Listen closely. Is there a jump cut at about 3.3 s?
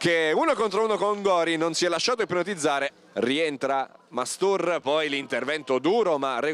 yes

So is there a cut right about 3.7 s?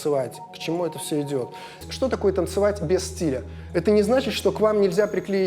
no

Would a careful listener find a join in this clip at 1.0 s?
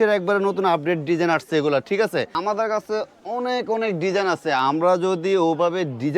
no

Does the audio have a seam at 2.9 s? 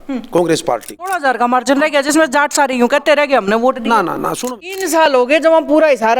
no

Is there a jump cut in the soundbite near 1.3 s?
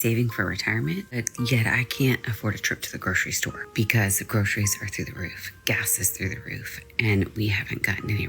yes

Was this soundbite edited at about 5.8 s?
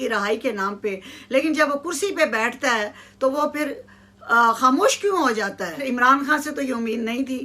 yes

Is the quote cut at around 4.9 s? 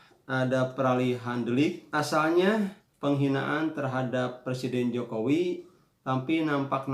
no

